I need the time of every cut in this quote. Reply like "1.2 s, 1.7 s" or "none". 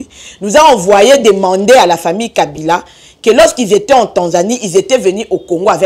none